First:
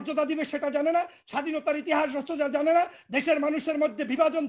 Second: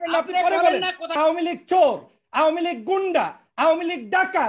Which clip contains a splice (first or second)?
second